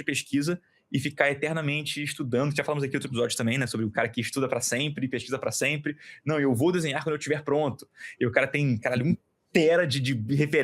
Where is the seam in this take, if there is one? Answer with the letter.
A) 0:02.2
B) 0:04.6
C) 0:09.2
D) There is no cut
D